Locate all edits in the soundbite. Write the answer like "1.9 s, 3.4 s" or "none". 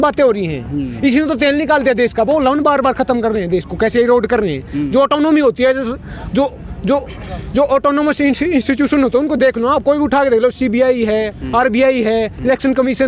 none